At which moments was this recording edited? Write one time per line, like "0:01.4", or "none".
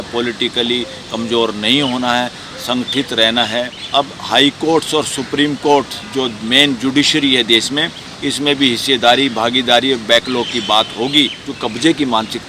0:03.8
0:11.4

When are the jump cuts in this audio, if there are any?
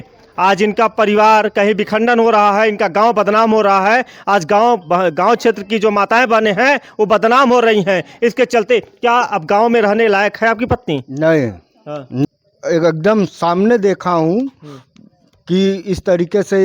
0:12.2

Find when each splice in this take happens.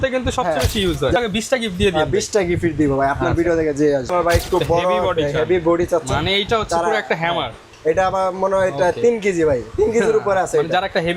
0:01.2
0:04.1

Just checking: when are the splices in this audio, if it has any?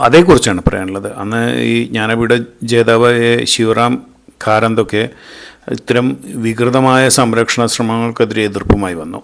none

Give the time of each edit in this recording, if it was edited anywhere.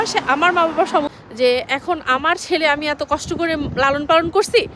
0:01.1

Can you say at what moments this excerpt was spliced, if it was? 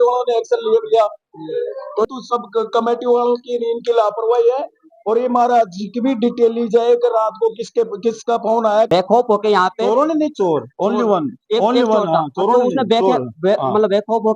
0:02.1
0:08.9

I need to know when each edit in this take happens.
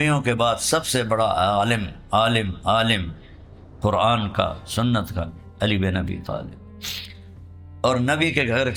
none

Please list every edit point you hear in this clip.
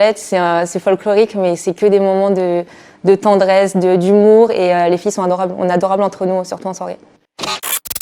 0:07.0

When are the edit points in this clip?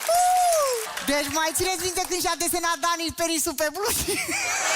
0:00.9

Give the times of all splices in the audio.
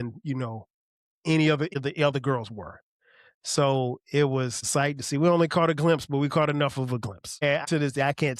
0:01.7
0:04.6
0:07.6

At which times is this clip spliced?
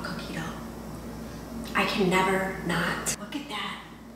0:03.1

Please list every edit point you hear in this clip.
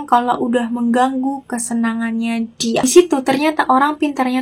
0:02.8

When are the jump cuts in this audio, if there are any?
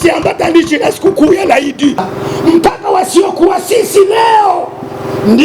0:02.1

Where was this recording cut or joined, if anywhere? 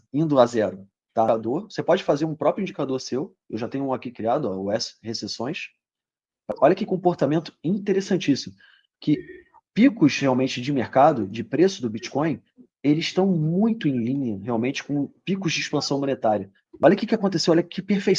0:01.3
0:06.5
0:16.6

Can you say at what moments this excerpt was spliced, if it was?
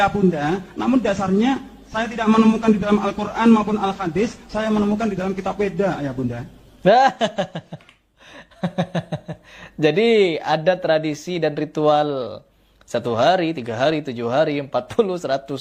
none

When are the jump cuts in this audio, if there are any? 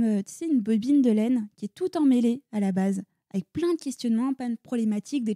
none

